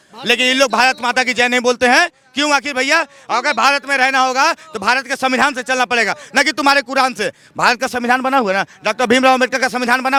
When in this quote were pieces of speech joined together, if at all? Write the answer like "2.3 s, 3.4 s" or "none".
none